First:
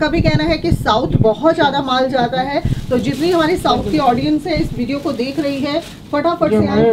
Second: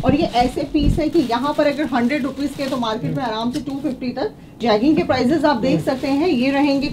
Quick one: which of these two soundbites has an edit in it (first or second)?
second